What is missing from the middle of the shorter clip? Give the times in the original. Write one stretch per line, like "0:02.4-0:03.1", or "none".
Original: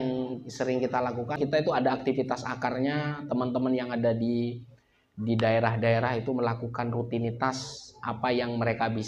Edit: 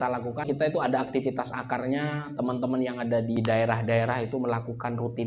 0:04.3-0:05.3